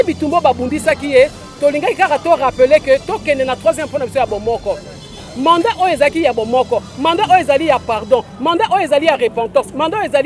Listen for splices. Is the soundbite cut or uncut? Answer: uncut